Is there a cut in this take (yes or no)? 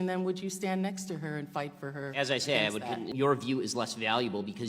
yes